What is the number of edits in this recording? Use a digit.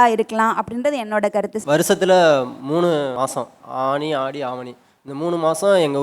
1